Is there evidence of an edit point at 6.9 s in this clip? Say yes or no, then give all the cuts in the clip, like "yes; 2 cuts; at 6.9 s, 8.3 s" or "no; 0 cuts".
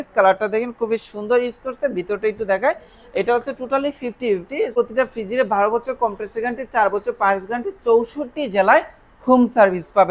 no; 1 cut; at 4.7 s